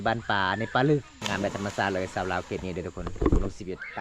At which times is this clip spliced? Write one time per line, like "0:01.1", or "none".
0:01.1